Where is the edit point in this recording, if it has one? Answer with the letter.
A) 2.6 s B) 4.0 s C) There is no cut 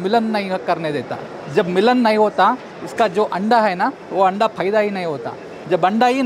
C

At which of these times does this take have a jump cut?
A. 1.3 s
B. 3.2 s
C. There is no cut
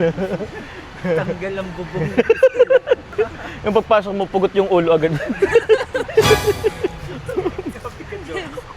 B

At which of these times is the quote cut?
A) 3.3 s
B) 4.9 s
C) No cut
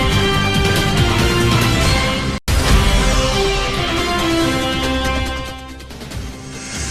C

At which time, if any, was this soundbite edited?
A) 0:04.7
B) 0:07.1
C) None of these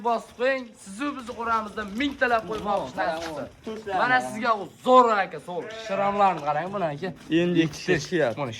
C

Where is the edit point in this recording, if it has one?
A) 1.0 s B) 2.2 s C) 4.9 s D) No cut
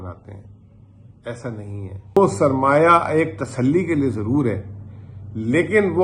B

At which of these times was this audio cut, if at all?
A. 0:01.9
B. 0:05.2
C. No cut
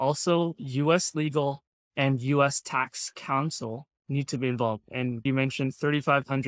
B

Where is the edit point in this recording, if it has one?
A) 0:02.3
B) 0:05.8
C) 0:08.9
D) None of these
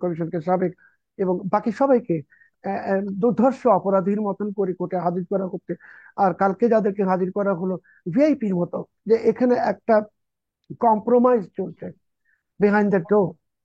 C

